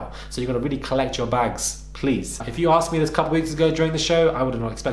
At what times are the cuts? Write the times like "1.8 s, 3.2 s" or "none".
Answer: 2.4 s